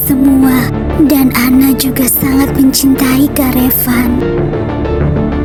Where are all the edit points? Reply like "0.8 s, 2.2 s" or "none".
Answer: none

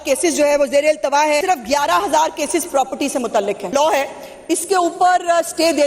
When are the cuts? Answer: 1.4 s, 3.7 s

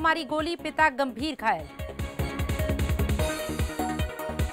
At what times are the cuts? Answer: 1.8 s

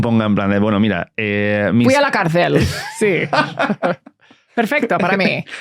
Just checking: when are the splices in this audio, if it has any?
none

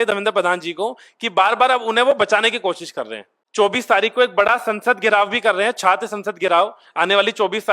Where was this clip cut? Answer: 3.3 s

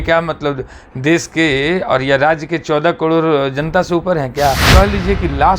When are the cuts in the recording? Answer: 4.6 s

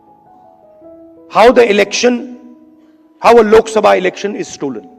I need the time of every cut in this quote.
1.1 s

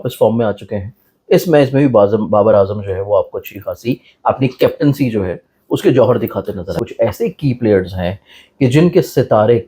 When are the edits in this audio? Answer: 6.7 s

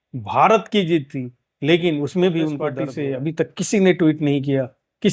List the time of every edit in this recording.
2.8 s

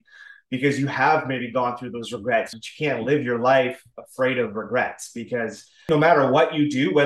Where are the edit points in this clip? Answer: 2.6 s, 5.9 s

